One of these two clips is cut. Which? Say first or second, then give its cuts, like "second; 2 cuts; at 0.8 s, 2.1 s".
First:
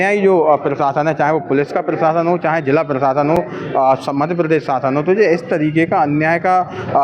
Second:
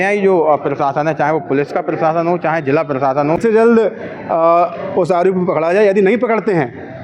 second; 1 cut; at 3.4 s